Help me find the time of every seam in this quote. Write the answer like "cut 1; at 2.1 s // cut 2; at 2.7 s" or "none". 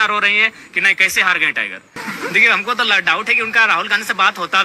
cut 1; at 2.0 s